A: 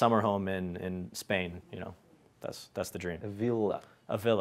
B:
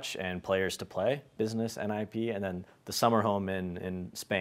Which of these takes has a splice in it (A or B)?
B